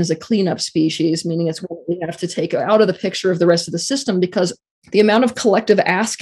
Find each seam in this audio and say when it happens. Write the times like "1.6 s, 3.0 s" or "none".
4.6 s

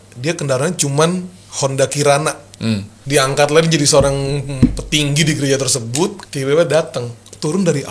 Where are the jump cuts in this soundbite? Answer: 2.9 s, 6.3 s

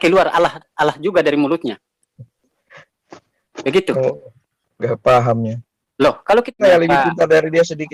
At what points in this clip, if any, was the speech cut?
6.6 s

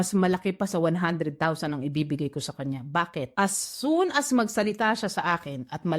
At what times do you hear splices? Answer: 3.3 s

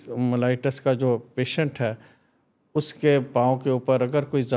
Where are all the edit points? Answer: none

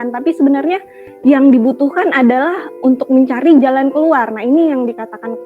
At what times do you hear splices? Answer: none

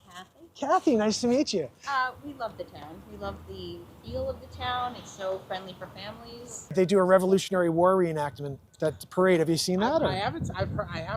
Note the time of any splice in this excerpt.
6.5 s

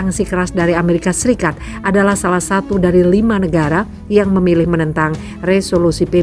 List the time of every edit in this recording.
none

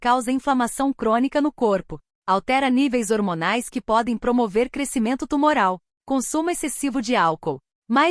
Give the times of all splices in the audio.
5.9 s

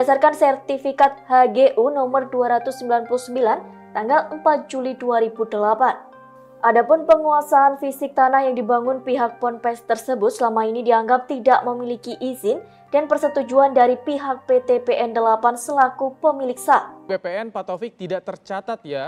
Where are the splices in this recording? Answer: 16.9 s

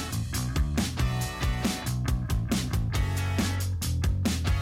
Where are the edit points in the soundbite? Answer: 2.3 s

